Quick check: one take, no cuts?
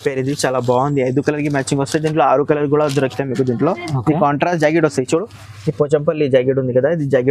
yes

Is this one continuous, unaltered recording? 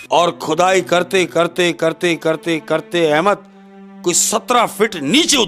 yes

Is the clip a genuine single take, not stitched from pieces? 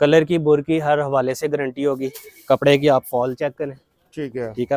yes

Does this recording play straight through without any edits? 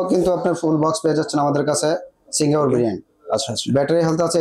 yes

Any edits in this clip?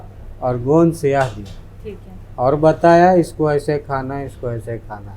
no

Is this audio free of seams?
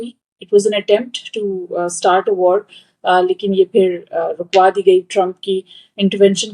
yes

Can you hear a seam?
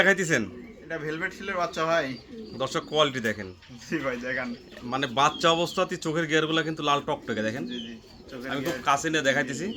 no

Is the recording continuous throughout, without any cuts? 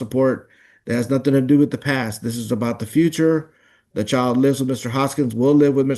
yes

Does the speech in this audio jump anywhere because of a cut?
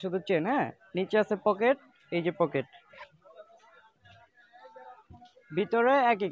no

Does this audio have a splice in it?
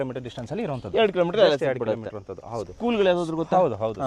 no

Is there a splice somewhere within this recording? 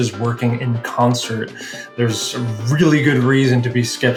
no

